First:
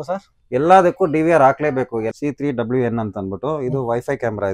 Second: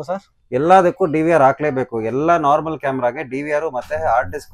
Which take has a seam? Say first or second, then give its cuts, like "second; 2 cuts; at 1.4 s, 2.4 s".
first; 1 cut; at 2.1 s